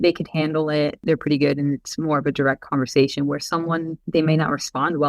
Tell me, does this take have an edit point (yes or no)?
yes